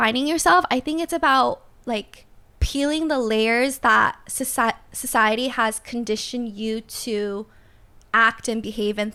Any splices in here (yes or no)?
no